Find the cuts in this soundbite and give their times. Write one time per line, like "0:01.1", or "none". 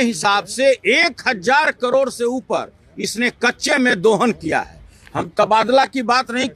none